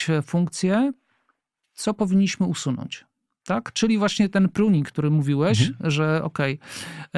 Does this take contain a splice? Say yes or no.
no